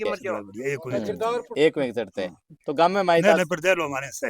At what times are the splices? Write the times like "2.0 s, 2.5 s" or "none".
1.5 s

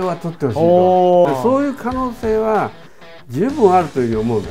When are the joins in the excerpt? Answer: 1.3 s

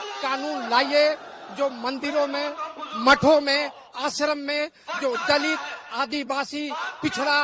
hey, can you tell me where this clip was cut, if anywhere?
none

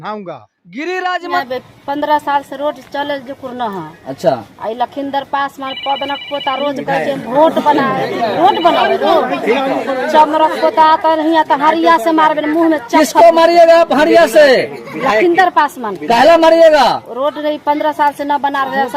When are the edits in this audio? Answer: 1.4 s

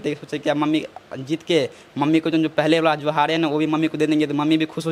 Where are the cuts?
none

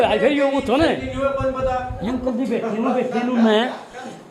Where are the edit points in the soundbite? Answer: 2.0 s

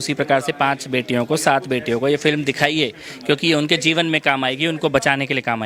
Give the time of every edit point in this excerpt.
none

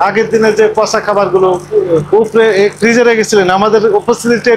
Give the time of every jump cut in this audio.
none

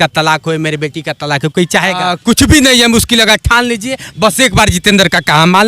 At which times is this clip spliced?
2.1 s

